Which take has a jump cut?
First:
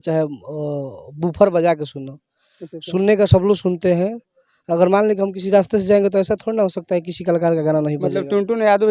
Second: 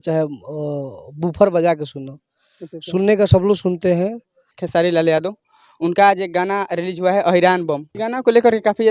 second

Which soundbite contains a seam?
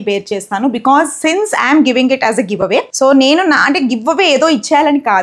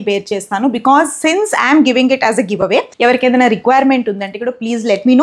second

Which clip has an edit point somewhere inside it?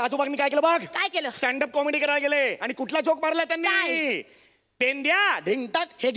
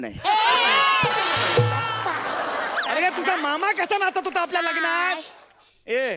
second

